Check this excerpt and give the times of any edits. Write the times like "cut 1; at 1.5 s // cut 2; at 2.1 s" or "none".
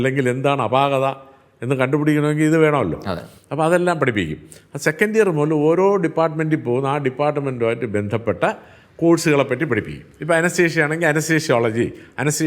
none